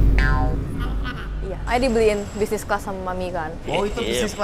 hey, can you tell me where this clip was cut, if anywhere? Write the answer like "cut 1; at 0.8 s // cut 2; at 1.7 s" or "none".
cut 1; at 1.6 s